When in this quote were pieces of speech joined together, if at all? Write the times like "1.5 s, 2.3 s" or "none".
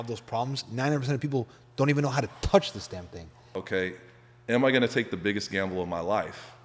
3.5 s